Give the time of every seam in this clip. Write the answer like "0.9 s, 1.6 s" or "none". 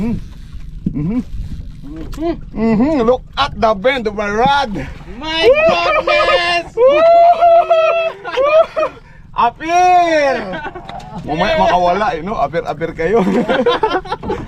none